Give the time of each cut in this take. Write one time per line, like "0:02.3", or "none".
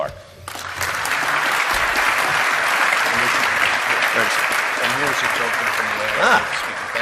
0:05.4